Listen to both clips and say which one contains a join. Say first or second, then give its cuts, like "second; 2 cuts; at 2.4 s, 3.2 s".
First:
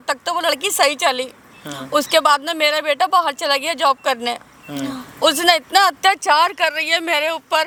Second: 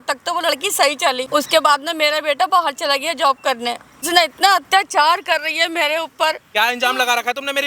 second; 3 cuts; at 1.2 s, 4.0 s, 6.4 s